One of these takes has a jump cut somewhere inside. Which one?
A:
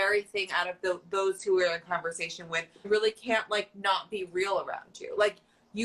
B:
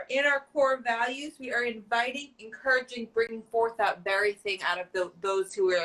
A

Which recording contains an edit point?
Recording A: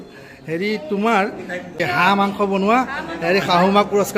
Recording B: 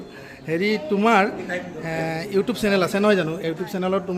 A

